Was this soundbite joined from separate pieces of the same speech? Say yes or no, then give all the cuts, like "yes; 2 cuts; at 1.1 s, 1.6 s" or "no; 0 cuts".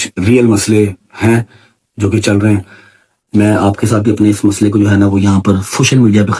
no; 0 cuts